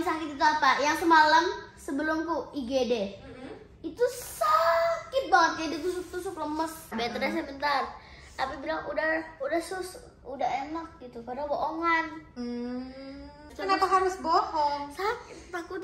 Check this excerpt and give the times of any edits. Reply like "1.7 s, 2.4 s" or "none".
6.9 s, 13.5 s